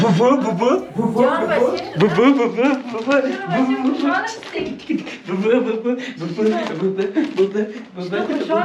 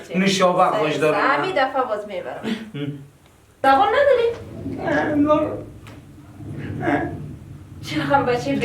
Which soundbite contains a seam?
second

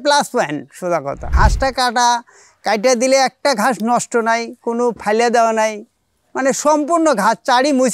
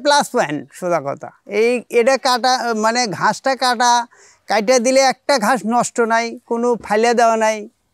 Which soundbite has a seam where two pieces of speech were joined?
first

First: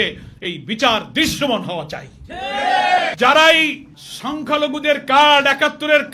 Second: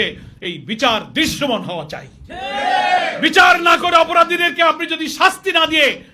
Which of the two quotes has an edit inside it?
first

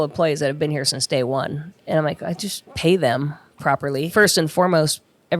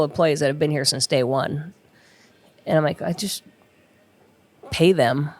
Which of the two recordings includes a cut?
first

